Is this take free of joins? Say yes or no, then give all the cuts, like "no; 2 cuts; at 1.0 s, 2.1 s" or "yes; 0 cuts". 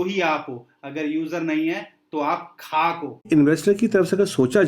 no; 1 cut; at 3.2 s